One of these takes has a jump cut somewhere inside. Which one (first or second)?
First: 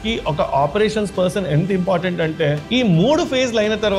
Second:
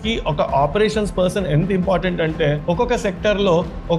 first